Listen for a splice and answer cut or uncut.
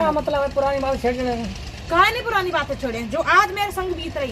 uncut